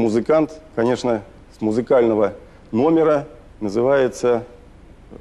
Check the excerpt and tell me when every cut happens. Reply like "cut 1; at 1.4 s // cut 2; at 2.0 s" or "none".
none